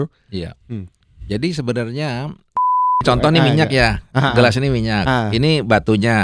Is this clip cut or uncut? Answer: cut